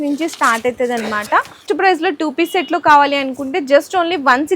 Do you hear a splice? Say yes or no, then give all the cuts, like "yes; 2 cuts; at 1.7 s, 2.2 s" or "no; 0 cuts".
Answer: yes; 1 cut; at 1.6 s